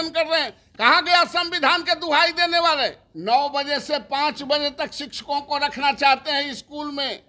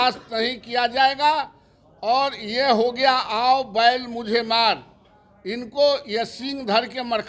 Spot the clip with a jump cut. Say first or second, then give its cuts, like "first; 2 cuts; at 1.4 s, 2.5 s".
first; 1 cut; at 3.1 s